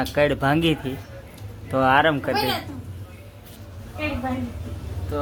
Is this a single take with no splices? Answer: yes; 0 cuts

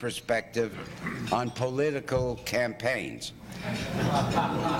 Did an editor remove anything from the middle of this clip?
yes; 1 cut; at 1.5 s

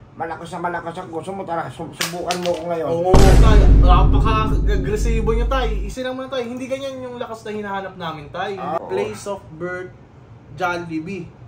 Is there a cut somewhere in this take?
yes; 1 cut; at 8.8 s

